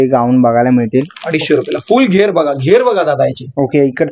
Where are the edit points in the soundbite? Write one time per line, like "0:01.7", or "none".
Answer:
none